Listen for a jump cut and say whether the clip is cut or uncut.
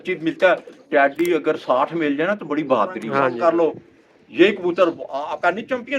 cut